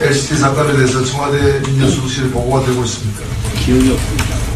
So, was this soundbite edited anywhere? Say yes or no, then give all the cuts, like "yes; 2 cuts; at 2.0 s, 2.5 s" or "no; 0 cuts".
yes; 1 cut; at 1.4 s